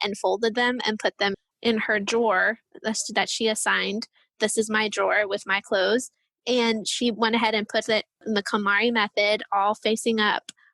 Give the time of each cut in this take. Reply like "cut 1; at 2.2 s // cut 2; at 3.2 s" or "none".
cut 1; at 8.2 s